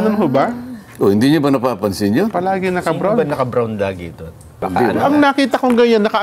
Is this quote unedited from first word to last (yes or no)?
no